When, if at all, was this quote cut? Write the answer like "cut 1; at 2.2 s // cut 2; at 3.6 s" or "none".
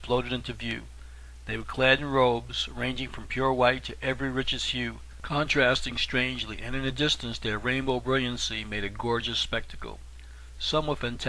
cut 1; at 10.0 s

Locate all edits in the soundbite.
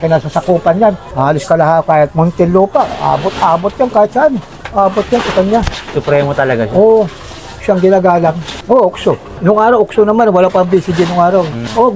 none

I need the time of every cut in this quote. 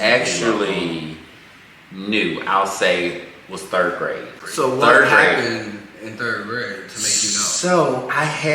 cut 1; at 4.4 s

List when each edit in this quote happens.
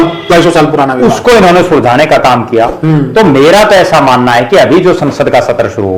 none

